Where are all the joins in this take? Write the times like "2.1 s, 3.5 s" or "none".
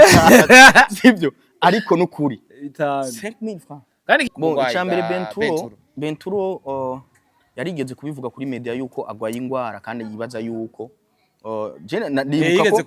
4.3 s